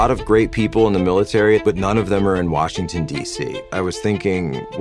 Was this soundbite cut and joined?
yes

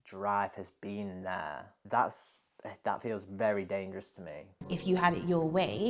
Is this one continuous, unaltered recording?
no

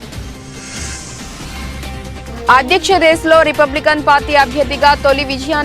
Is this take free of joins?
no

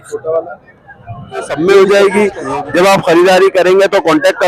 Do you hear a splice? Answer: yes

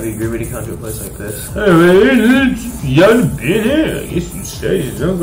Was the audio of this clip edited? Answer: yes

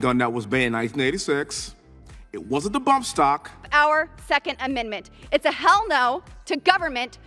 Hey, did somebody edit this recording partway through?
yes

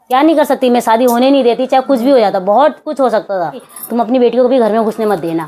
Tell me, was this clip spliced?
yes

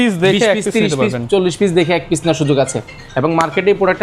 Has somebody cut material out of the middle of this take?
no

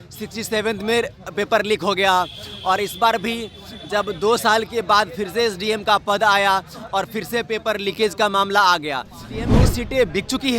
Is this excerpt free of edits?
no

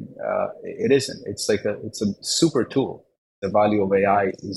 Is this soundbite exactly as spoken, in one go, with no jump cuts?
no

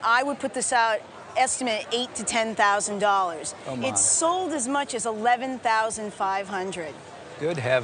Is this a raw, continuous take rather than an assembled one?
yes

